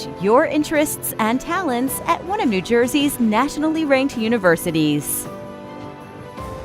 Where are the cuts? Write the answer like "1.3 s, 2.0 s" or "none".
5.0 s